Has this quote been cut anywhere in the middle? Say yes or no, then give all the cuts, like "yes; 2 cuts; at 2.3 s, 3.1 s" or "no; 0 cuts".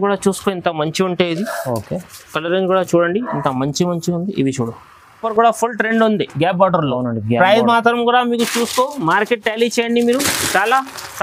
yes; 1 cut; at 5.2 s